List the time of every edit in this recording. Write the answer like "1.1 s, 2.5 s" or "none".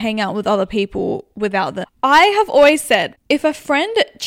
1.8 s, 3.2 s